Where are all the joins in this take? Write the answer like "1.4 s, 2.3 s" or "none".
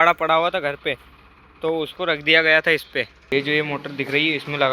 3.3 s